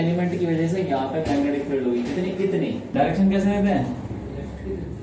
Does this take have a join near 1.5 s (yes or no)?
no